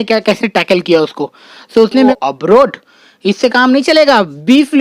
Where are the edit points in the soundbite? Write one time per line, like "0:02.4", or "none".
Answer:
0:02.1